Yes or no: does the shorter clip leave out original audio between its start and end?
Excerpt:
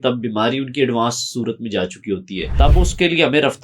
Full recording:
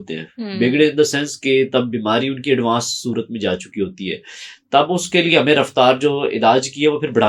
yes